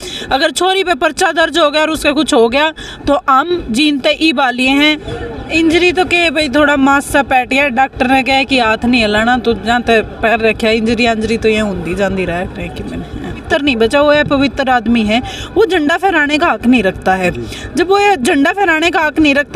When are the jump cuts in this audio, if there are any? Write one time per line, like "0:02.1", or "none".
0:05.0
0:13.4